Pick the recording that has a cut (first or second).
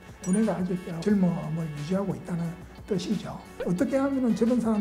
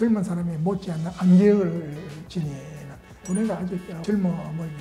first